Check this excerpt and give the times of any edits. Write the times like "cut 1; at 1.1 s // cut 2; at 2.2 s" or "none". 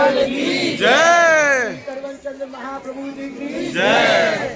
none